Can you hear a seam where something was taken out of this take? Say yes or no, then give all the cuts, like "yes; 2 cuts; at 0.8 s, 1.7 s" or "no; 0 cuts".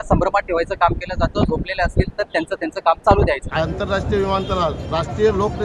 yes; 1 cut; at 3.5 s